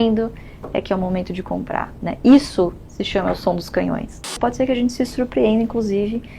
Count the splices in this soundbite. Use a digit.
1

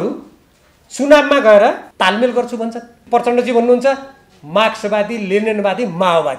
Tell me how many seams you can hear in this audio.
2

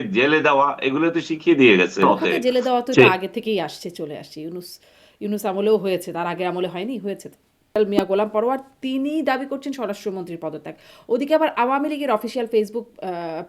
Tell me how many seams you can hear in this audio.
2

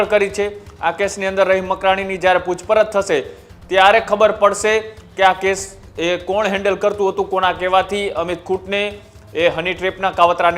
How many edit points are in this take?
0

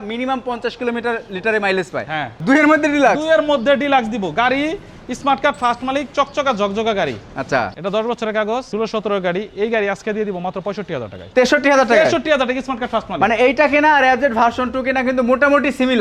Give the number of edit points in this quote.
4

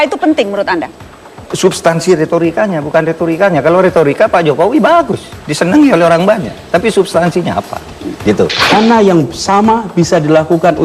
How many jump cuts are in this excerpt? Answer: 1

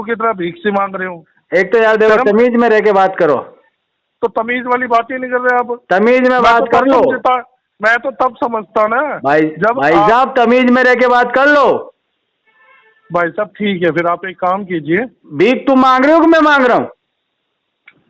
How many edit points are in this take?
0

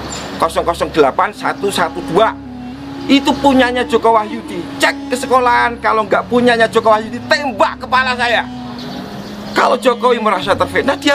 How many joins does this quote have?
1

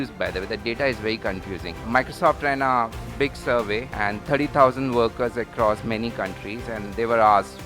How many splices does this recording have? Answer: 1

